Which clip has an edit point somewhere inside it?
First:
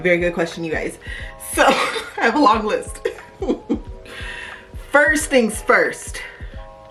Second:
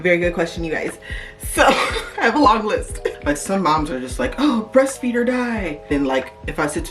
second; 2 cuts; at 3.2 s, 5.9 s

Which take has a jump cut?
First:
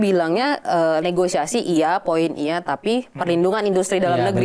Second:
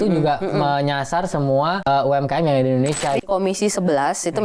second; 2 cuts; at 1.8 s, 3.2 s

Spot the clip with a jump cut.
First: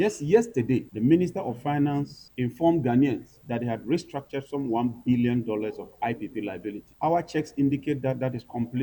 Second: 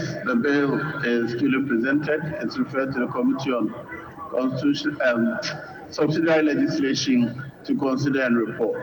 first; 4 cuts; at 0.9 s, 2.2 s, 3.3 s, 6.9 s

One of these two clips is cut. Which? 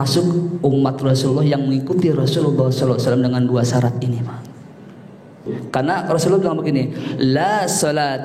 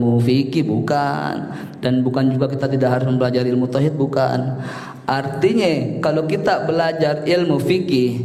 first; 1 cut; at 5.5 s

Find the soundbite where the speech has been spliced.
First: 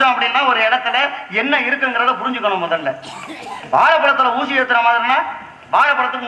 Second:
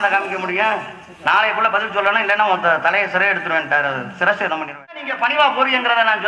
second; 1 cut; at 5.0 s

